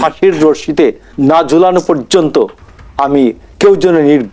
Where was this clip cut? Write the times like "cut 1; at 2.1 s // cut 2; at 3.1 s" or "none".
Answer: cut 1; at 1.1 s